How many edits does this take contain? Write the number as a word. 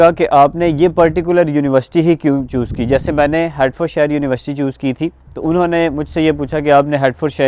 zero